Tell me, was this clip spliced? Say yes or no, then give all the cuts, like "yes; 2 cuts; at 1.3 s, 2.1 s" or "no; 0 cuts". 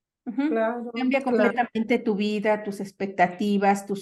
no; 0 cuts